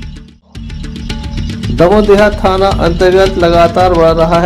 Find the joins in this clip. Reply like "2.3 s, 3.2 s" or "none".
1.0 s